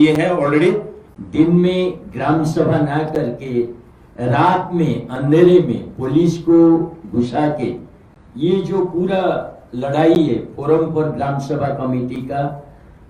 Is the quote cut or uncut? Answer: cut